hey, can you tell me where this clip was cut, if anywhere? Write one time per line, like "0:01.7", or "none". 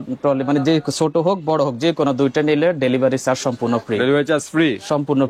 none